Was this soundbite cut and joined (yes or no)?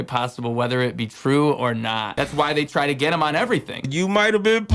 yes